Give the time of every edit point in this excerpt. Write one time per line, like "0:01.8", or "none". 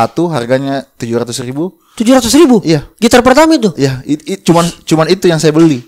none